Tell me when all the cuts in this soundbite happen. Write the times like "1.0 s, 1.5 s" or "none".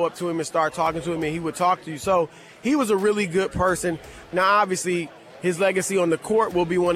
4.3 s